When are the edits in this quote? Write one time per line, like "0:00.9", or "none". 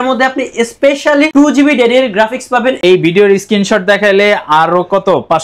0:02.8